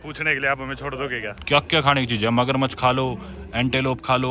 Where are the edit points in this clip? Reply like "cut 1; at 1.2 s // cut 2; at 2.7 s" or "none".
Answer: cut 1; at 1.3 s